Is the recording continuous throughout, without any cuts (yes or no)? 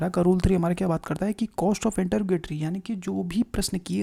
yes